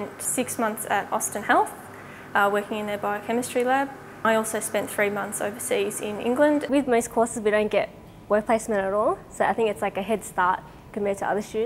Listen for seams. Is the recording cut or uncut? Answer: cut